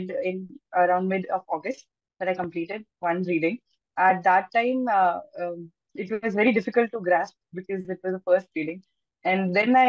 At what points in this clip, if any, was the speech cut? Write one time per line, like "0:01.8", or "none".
none